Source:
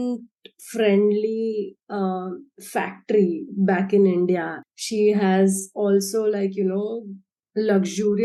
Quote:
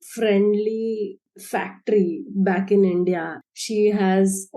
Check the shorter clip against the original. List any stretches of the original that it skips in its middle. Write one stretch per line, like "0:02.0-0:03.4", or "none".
0:01.8-0:02.5